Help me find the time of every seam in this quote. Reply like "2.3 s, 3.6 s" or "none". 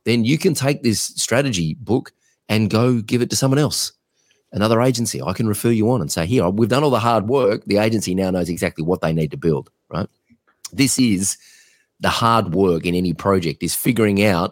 none